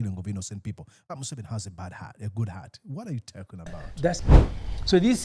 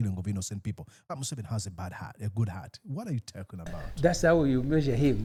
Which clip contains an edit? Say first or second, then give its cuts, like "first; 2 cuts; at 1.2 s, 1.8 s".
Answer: first; 1 cut; at 4.2 s